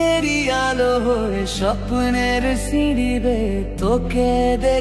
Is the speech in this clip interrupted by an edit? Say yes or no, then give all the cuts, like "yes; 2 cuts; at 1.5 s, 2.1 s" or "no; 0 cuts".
no; 0 cuts